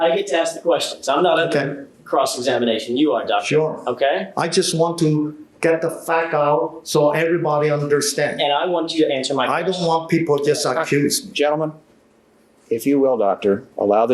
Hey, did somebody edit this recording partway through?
no; 0 cuts

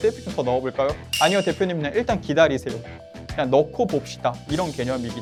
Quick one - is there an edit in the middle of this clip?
no; 0 cuts

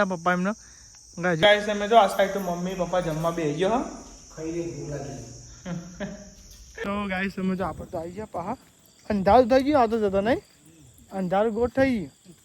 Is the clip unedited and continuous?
no; 2 cuts; at 1.4 s, 6.8 s

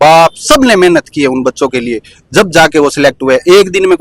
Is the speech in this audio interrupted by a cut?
no; 0 cuts

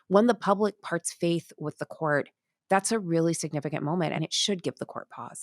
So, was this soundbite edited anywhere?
yes; 1 cut; at 4.2 s

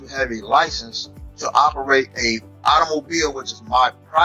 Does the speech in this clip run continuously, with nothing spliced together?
yes; 0 cuts

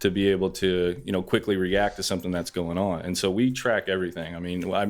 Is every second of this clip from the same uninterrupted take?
yes; 0 cuts

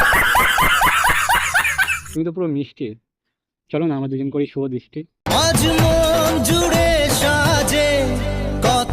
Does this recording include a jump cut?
yes; 2 cuts; at 1.2 s, 2.0 s

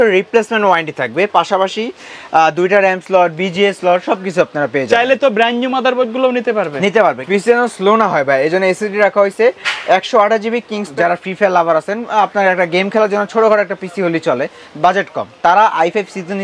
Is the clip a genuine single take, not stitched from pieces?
no; 2 cuts; at 7.2 s, 10.9 s

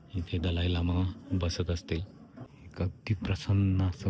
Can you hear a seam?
no; 0 cuts

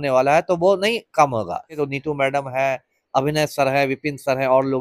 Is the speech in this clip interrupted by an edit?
yes; 1 cut; at 1.8 s

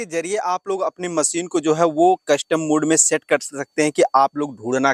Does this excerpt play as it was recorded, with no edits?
yes; 0 cuts

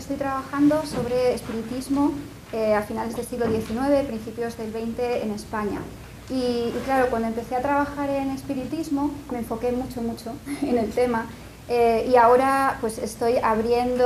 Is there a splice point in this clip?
no; 0 cuts

